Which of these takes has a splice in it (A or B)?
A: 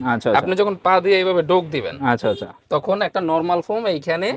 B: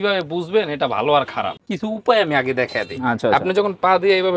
B